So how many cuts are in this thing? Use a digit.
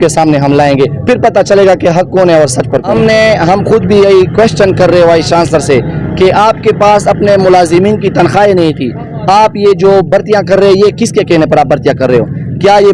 1